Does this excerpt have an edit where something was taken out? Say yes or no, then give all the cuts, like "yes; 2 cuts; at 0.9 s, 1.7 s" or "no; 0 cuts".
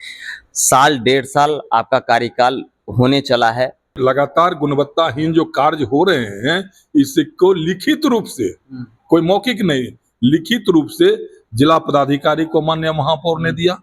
yes; 1 cut; at 4.0 s